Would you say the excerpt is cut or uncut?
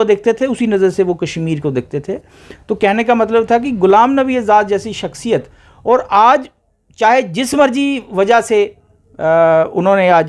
uncut